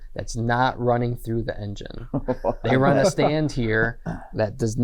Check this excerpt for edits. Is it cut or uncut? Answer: uncut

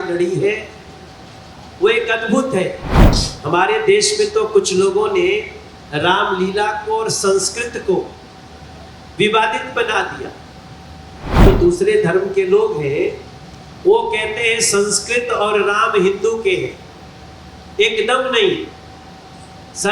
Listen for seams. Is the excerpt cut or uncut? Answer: cut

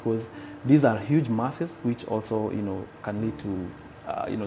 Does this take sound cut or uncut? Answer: uncut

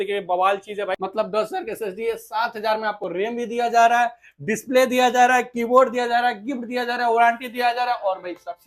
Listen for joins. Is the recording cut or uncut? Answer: cut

